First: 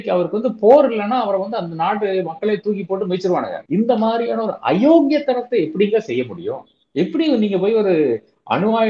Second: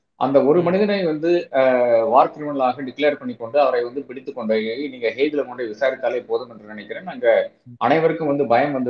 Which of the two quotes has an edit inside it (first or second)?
first